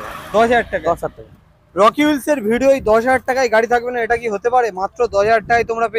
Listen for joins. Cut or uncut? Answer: uncut